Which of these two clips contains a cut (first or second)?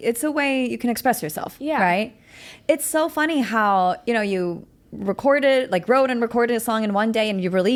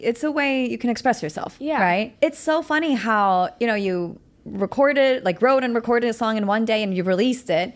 second